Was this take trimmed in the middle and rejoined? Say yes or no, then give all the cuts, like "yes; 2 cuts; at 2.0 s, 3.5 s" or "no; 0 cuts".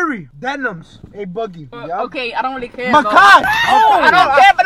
no; 0 cuts